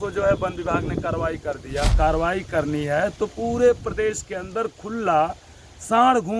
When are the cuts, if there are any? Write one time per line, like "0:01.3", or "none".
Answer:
0:01.9